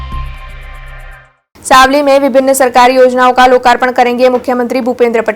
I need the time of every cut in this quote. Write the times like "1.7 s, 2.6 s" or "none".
0.9 s